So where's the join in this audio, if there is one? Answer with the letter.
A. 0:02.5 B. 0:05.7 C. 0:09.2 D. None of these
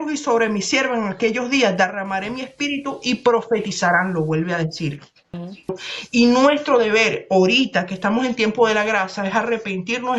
B